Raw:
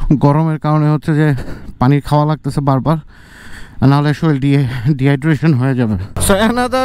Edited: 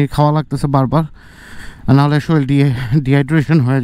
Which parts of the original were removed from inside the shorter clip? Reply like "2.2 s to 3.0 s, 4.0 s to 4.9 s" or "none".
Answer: none